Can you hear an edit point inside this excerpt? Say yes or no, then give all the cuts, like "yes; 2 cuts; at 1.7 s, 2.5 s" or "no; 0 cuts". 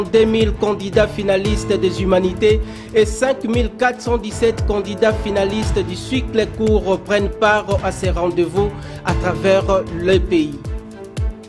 yes; 1 cut; at 10.6 s